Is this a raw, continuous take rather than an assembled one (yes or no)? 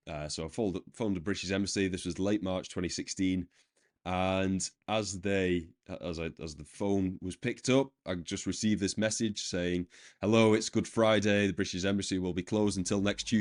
yes